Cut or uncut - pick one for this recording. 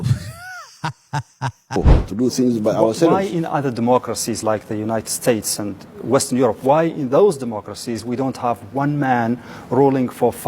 cut